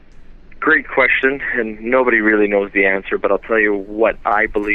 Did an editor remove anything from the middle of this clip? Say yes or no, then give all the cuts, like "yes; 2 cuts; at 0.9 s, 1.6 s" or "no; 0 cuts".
yes; 1 cut; at 0.9 s